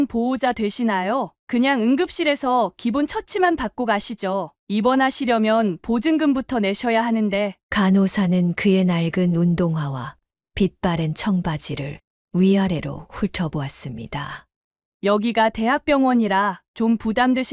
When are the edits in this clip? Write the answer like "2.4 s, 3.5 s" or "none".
1.4 s